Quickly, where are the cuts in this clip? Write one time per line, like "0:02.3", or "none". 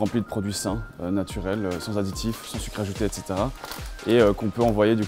none